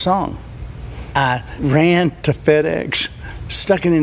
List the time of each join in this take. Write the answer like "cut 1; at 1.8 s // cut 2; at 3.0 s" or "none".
cut 1; at 1.0 s // cut 2; at 2.2 s